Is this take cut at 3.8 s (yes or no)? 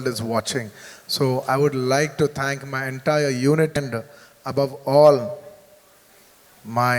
yes